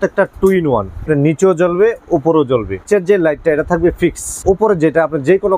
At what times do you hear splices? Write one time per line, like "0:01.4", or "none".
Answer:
0:01.1
0:02.9
0:04.4